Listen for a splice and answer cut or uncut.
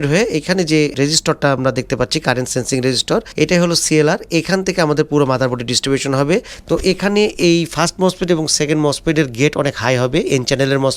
cut